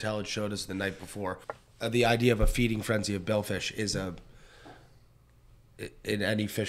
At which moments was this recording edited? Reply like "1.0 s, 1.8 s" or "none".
1.5 s